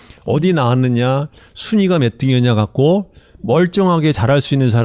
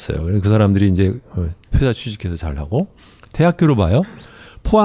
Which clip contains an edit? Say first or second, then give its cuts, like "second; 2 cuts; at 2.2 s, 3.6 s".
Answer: second; 1 cut; at 2.2 s